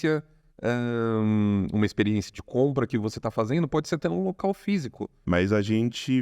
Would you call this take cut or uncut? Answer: cut